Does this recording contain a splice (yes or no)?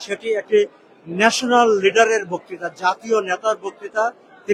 no